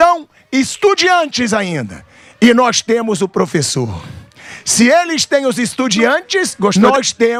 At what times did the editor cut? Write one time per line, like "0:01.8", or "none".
none